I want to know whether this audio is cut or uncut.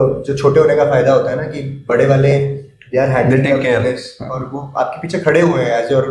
uncut